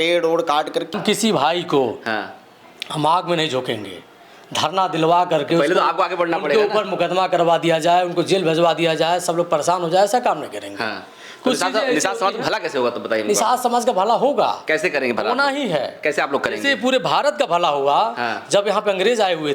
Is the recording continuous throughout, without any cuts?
no; 1 cut; at 0.9 s

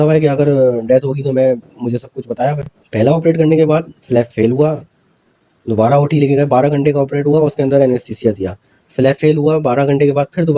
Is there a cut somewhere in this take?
no; 0 cuts

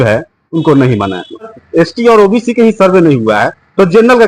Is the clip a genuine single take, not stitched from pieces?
no; 1 cut; at 1.5 s

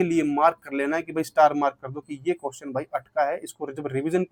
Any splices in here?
no; 0 cuts

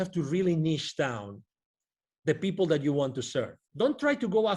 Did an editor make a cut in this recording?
yes; 1 cut; at 3.6 s

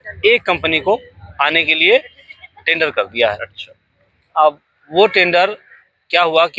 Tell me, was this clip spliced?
no; 0 cuts

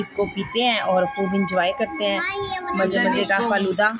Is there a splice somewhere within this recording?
no; 0 cuts

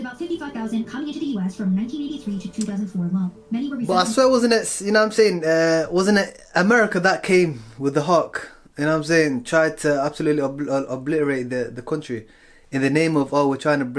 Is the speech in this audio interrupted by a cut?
no; 0 cuts

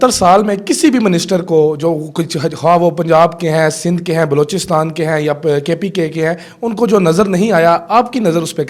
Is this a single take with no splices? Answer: yes; 0 cuts

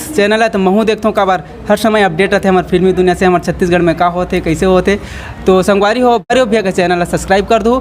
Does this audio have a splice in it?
yes; 1 cut; at 6.3 s

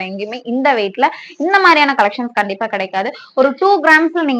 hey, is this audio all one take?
yes; 0 cuts

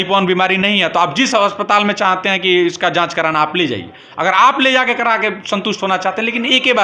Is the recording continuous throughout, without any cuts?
yes; 0 cuts

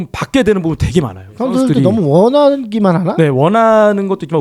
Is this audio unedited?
no; 1 cut; at 1.2 s

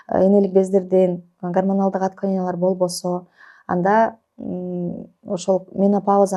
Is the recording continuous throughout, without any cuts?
yes; 0 cuts

